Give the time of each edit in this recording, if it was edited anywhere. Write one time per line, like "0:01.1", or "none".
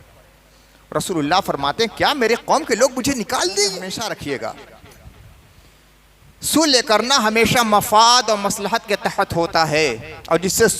0:03.9

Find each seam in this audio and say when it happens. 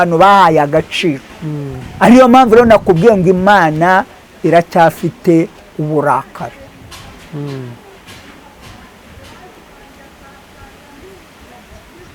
none

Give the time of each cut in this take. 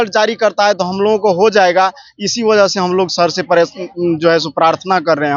none

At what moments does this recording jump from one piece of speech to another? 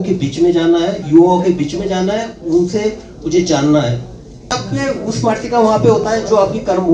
0:04.5

